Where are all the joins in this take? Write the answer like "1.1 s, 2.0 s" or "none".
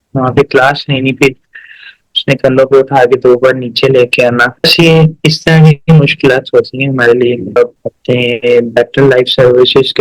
7.6 s